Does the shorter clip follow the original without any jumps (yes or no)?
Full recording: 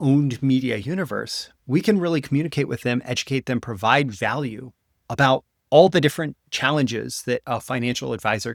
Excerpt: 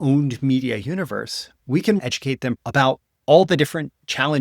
no